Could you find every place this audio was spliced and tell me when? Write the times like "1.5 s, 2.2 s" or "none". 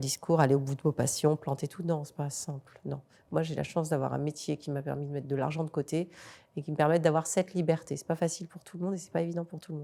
none